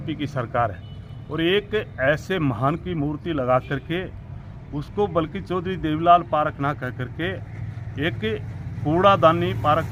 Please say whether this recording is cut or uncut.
uncut